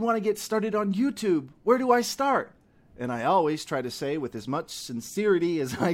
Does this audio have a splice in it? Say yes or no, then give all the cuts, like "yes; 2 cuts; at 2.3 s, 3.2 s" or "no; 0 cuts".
no; 0 cuts